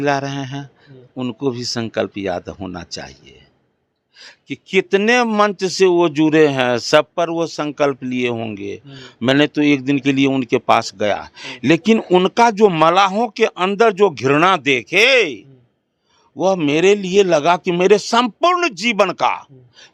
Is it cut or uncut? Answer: uncut